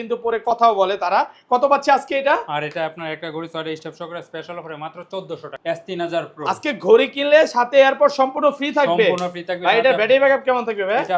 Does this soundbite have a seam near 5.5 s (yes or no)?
yes